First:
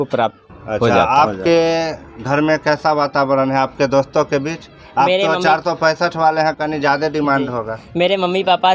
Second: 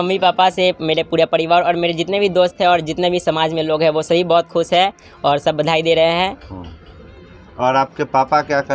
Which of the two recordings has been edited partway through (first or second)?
first